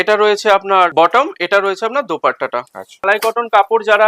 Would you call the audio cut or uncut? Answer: cut